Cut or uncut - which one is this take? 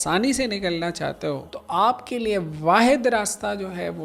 cut